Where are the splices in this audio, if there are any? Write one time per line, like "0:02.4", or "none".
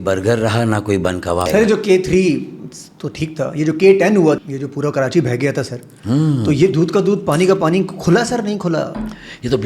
0:01.5
0:04.4